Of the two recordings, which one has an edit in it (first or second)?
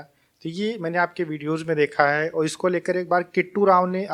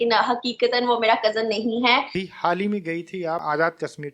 second